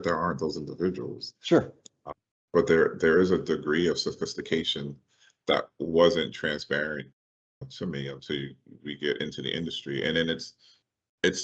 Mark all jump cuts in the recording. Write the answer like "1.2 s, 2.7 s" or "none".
none